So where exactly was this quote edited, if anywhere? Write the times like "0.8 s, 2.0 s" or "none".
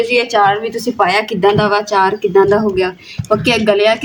none